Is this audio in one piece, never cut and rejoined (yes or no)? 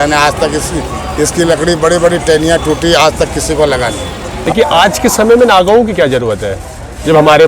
no